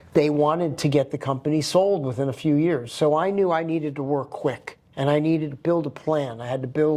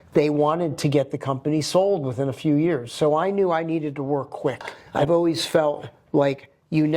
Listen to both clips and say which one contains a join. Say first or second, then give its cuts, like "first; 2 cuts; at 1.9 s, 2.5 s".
second; 1 cut; at 4.7 s